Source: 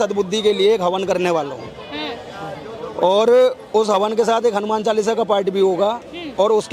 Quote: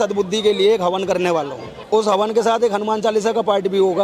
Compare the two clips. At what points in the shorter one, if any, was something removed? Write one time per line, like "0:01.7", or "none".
0:01.8

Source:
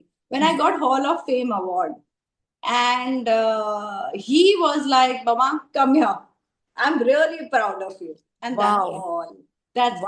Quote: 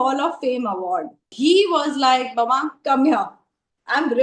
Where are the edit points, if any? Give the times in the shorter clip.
0:01.2

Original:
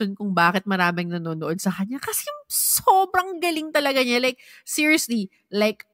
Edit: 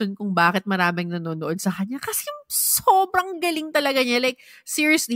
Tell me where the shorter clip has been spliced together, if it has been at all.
none

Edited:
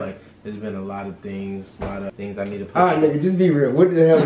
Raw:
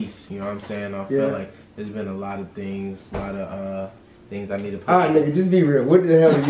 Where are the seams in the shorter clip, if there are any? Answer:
0:02.1

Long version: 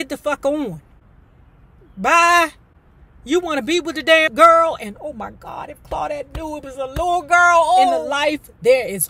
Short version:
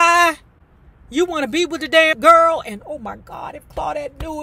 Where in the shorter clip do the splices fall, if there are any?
none

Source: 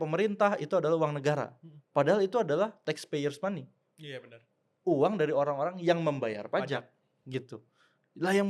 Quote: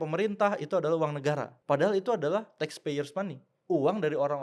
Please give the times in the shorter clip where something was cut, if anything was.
0:01.5
0:03.5

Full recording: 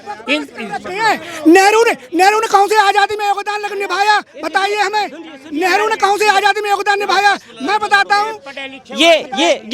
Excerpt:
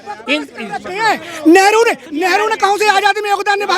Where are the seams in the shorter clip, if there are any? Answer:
0:02.0

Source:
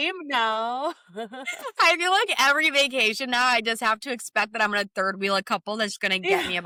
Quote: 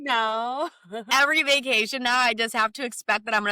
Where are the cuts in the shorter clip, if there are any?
0:01.1

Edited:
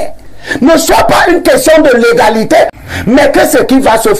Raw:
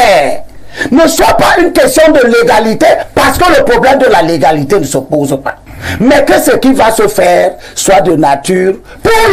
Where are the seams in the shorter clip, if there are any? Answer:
0:02.8

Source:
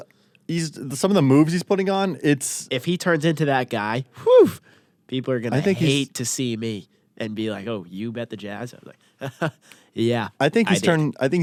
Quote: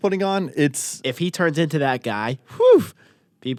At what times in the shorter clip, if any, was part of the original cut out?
none

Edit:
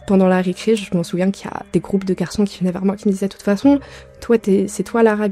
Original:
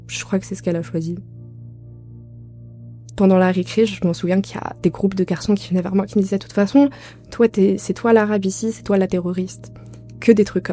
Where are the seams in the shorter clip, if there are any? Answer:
none

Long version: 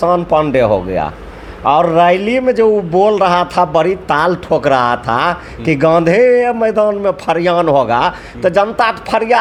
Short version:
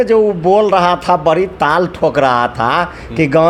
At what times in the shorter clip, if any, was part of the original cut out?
none

